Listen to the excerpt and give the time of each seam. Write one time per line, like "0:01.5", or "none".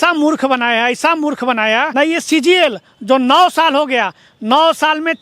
0:01.9